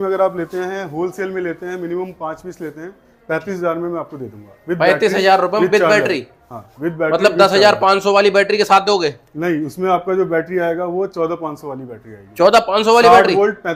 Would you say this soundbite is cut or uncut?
uncut